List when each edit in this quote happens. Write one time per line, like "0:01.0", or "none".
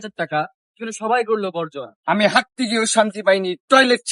0:01.9